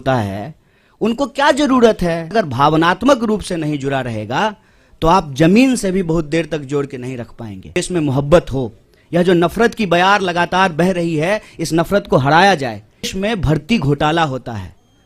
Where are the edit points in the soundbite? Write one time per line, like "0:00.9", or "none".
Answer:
0:02.3
0:07.8
0:13.1